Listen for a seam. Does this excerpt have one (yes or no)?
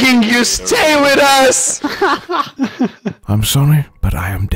no